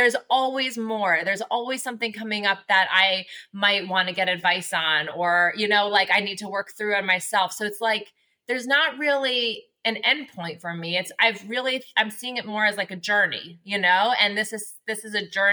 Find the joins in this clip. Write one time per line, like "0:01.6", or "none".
none